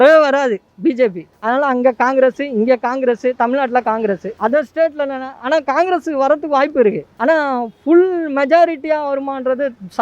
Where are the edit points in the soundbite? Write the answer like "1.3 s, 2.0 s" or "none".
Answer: 1.3 s, 4.3 s, 7.1 s